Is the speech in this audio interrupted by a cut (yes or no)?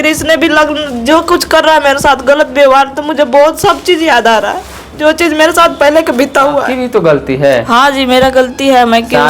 yes